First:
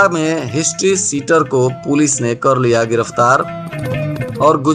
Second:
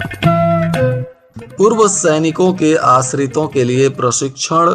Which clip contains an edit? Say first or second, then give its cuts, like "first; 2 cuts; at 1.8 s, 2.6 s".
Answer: second; 1 cut; at 1.2 s